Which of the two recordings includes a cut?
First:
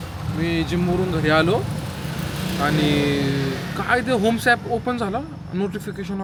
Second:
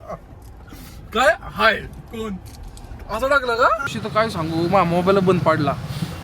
second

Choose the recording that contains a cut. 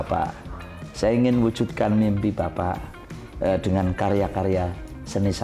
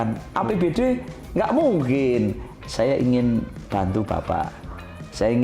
second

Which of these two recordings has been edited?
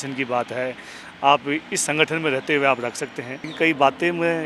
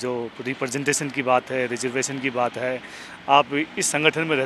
first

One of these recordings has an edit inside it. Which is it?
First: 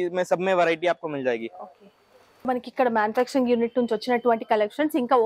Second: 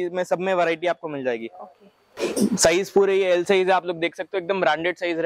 first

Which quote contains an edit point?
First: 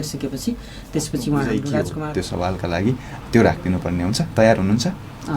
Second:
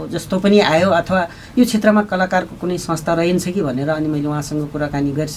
first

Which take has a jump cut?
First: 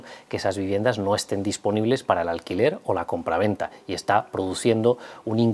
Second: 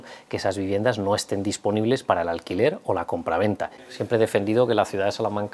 second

